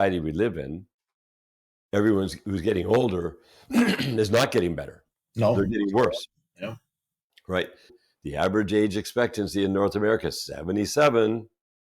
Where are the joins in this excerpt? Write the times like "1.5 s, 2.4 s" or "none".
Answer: 7.9 s